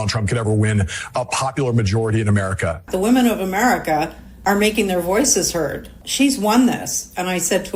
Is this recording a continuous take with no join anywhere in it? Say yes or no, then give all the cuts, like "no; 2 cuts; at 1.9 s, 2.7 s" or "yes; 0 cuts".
no; 3 cuts; at 2.9 s, 4.2 s, 6.0 s